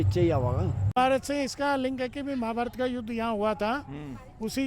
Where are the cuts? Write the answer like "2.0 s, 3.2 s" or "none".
0.9 s